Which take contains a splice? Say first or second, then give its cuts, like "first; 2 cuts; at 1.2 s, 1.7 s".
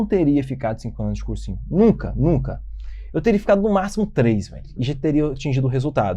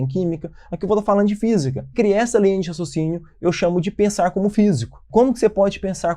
second; 2 cuts; at 1.9 s, 5.1 s